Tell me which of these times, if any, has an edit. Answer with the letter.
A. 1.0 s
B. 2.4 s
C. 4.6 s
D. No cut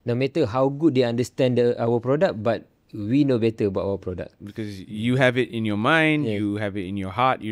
D